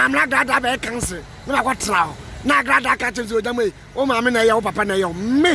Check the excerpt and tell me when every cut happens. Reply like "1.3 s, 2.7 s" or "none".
none